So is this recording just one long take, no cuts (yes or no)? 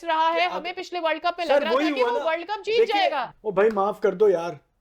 no